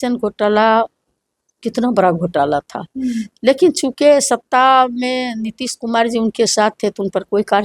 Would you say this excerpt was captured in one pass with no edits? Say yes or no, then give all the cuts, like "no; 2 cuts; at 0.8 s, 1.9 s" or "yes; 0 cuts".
yes; 0 cuts